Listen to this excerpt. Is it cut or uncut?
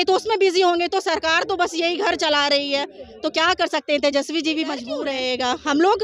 cut